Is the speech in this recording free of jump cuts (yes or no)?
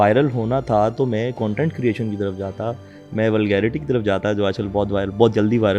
yes